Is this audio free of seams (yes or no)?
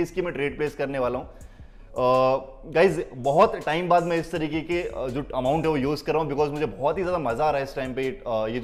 yes